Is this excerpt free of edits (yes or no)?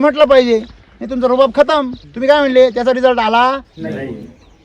no